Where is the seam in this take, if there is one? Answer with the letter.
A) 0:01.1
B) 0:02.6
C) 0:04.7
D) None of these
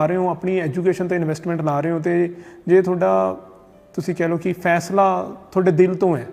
D